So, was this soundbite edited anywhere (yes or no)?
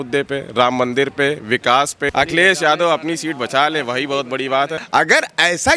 yes